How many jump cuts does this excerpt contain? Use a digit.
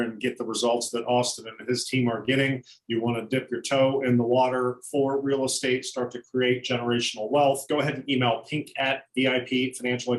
1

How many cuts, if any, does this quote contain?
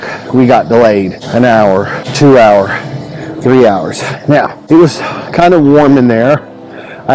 3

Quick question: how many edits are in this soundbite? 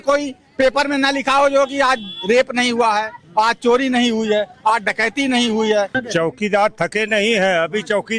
1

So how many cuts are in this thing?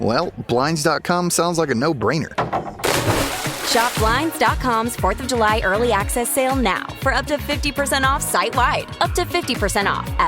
2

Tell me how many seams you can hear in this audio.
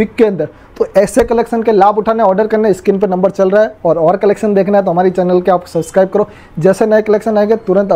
0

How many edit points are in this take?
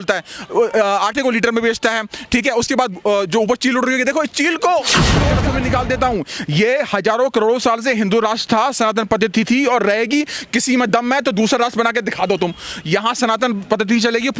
1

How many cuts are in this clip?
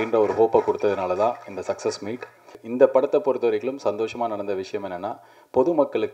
1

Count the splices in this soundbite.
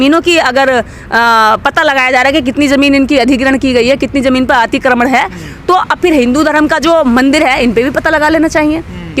0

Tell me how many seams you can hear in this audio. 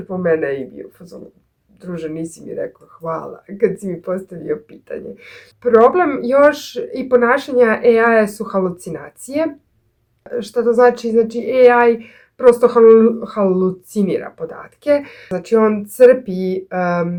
0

